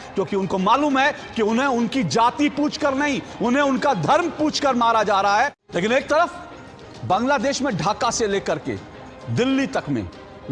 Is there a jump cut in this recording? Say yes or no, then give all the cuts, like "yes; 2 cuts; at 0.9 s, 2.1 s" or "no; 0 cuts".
yes; 1 cut; at 5.6 s